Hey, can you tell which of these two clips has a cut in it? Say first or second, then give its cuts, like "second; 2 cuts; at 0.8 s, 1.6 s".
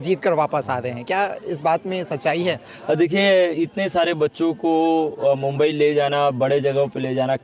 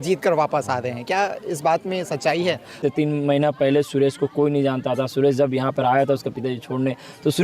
second; 1 cut; at 2.8 s